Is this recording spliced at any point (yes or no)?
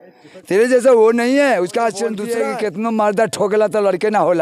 yes